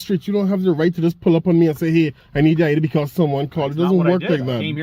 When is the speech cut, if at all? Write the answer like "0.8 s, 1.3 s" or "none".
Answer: none